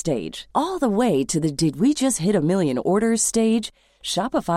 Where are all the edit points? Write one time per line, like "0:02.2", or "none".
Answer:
none